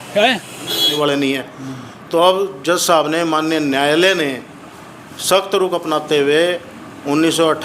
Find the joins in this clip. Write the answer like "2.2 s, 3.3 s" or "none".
0.9 s

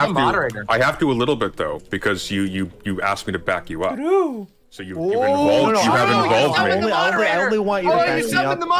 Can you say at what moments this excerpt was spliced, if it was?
none

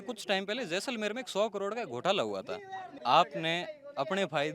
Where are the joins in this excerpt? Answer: 3.0 s

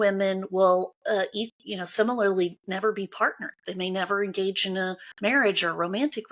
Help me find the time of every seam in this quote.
none

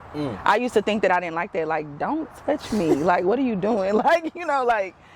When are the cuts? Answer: none

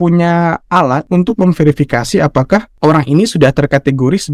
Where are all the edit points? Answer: 1.1 s, 2.7 s

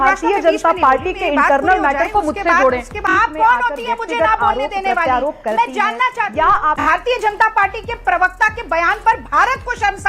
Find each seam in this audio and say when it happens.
3.0 s, 6.8 s

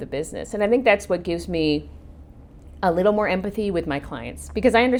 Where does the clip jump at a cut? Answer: none

